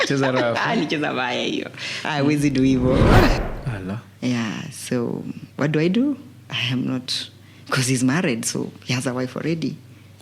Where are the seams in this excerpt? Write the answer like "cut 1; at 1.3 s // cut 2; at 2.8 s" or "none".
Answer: cut 1; at 3.4 s

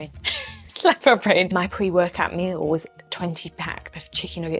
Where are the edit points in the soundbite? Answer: cut 1; at 1.5 s

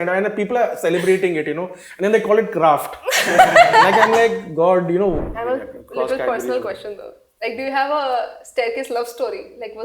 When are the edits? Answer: cut 1; at 5.2 s

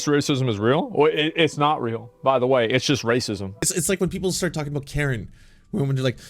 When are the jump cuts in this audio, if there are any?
cut 1; at 3.5 s

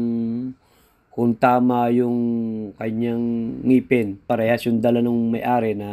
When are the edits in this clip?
cut 1; at 4.2 s

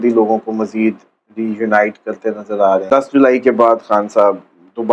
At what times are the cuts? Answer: cut 1; at 2.9 s

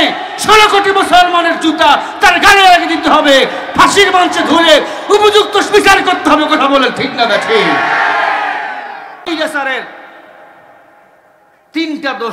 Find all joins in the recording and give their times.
cut 1; at 9.3 s

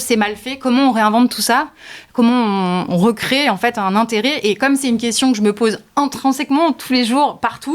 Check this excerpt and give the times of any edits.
cut 1; at 2.8 s

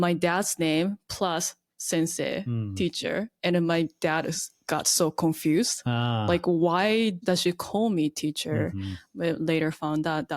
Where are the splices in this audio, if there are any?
none

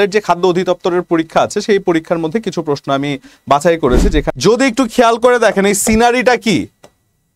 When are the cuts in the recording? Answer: cut 1; at 4.3 s

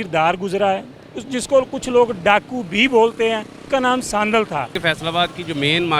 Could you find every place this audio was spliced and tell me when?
cut 1; at 3.5 s // cut 2; at 4.7 s

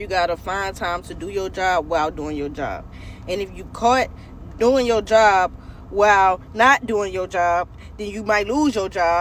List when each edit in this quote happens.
none

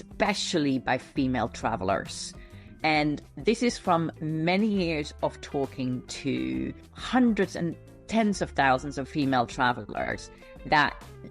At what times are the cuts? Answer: none

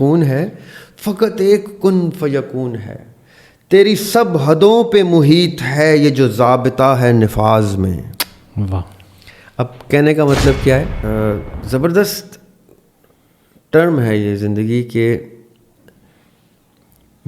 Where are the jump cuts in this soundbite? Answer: cut 1; at 11.0 s

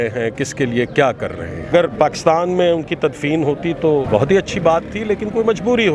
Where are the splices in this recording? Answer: cut 1; at 1.7 s // cut 2; at 4.1 s

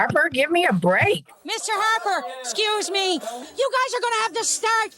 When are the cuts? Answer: cut 1; at 1.3 s

